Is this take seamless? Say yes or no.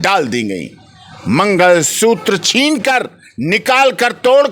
yes